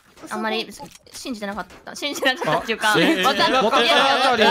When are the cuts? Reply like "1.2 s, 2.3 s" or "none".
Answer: none